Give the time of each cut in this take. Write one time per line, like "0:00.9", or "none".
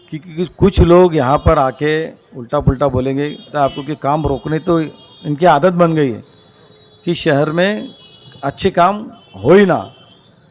0:03.5

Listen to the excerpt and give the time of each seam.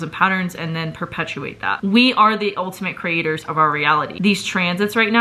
0:01.8
0:04.1

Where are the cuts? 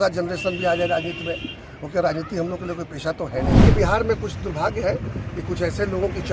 0:03.6

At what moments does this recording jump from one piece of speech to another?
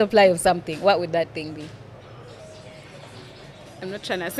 0:02.4

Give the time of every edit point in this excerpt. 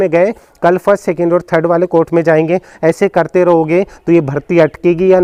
none

